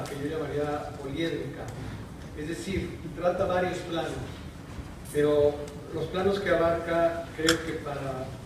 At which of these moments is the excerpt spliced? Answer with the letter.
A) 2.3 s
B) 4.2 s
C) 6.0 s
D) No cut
A